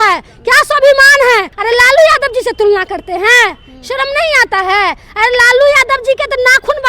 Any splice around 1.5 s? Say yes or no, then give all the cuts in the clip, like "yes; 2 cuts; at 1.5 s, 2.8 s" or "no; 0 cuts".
yes; 1 cut; at 1.5 s